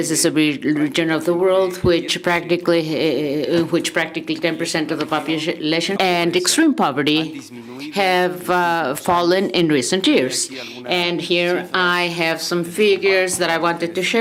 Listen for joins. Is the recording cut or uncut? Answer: uncut